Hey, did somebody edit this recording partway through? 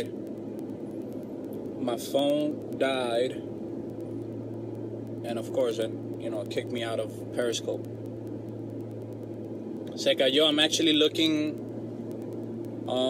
no; 0 cuts

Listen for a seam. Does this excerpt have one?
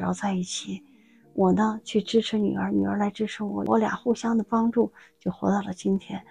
yes; 1 cut; at 3.7 s

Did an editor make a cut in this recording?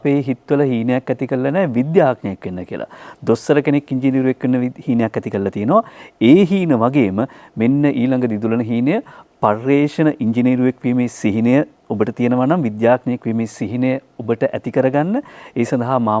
no; 0 cuts

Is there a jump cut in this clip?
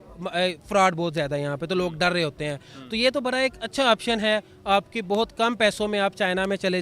no; 0 cuts

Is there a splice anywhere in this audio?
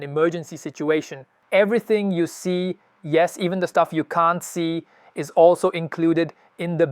yes; 1 cut; at 1.3 s

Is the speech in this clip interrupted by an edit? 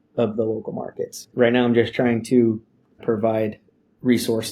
yes; 2 cuts; at 1.3 s, 3.0 s

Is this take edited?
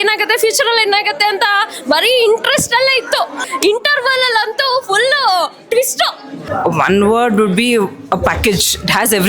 yes; 2 cuts; at 3.4 s, 6.5 s

